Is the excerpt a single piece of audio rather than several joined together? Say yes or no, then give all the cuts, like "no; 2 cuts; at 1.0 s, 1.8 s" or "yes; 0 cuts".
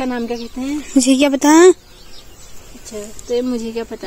yes; 0 cuts